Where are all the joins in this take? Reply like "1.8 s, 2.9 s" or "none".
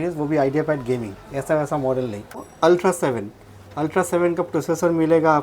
2.5 s